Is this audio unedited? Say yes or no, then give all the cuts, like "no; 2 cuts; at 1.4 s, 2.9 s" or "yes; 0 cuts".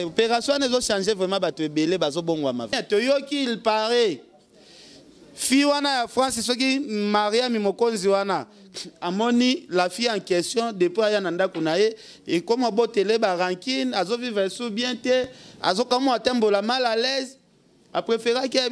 no; 1 cut; at 2.7 s